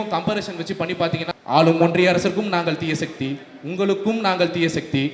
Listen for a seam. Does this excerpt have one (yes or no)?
yes